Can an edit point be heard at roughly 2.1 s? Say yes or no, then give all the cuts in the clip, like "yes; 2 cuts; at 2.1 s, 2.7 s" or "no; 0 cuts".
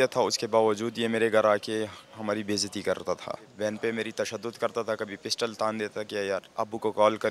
no; 1 cut; at 3.5 s